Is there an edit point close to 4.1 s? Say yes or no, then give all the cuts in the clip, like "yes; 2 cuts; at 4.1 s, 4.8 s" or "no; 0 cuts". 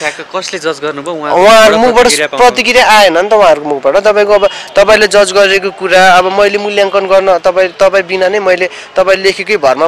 no; 0 cuts